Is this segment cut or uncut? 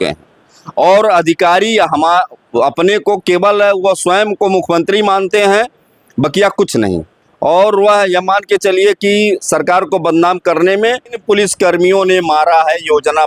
cut